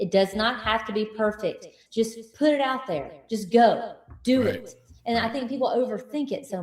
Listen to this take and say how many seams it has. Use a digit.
1